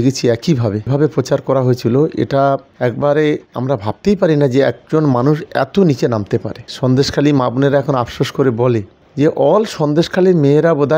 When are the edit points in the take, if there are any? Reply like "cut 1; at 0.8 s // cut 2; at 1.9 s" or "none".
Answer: cut 1; at 0.9 s // cut 2; at 6.6 s // cut 3; at 9.0 s